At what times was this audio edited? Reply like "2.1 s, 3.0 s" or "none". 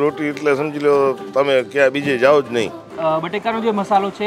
2.8 s

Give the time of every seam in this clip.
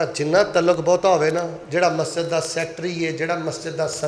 none

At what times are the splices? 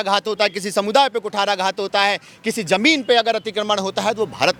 none

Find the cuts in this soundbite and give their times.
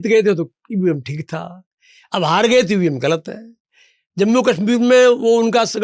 none

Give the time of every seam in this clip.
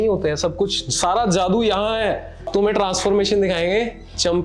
2.5 s

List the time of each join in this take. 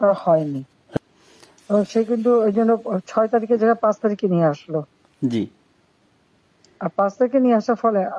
1.0 s

